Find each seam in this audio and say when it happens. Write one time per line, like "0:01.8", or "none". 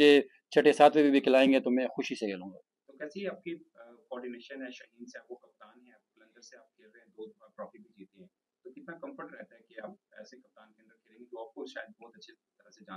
none